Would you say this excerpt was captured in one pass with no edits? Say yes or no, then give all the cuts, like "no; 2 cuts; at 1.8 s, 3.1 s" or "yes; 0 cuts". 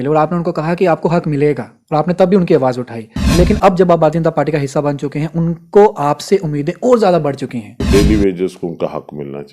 no; 2 cuts; at 3.2 s, 7.8 s